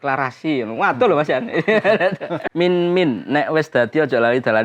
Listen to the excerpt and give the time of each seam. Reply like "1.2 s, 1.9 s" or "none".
2.4 s